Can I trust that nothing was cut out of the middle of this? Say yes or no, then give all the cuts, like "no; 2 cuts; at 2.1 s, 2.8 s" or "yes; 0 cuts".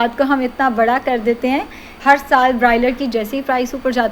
no; 1 cut; at 2.0 s